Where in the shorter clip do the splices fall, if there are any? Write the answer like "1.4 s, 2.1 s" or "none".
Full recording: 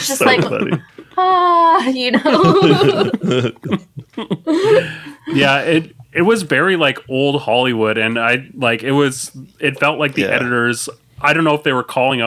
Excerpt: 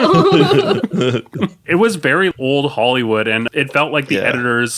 1.6 s, 2.3 s, 3.5 s